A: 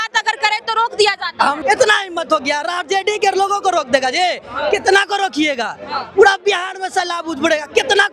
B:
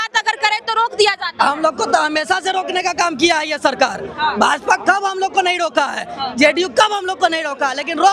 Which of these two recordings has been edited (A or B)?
A